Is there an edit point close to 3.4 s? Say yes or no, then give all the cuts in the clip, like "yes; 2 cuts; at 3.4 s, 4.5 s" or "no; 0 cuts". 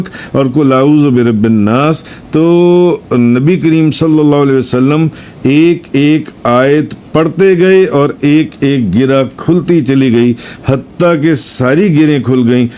no; 0 cuts